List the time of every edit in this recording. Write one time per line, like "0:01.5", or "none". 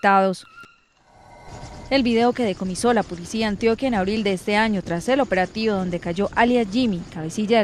0:06.5